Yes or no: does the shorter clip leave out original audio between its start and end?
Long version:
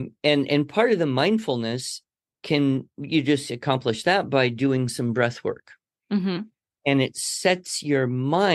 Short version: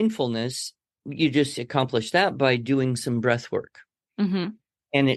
yes